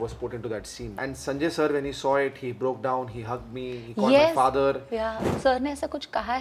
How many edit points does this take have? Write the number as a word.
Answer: two